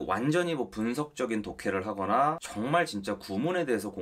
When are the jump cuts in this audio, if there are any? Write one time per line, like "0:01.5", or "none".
none